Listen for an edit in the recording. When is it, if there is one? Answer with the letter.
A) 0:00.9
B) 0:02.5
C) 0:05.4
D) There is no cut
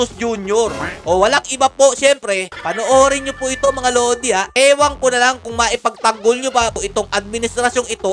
B